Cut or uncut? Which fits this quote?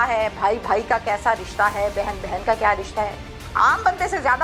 uncut